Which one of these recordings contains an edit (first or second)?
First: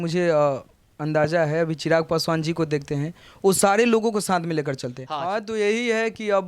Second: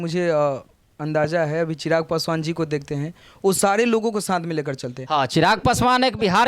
first